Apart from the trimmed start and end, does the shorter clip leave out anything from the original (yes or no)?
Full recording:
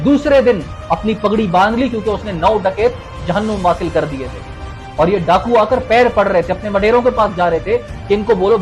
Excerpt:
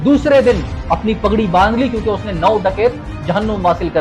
no